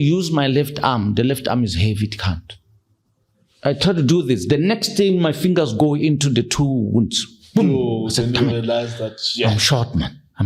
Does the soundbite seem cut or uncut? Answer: uncut